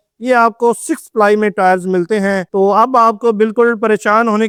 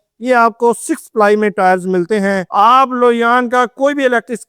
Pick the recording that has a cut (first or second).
second